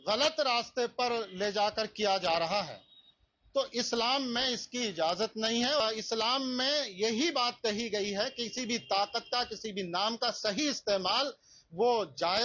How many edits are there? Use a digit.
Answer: 1